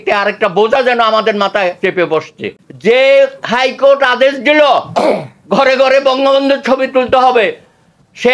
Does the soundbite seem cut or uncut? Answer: cut